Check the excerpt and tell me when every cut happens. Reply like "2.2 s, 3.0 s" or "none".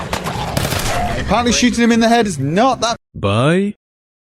none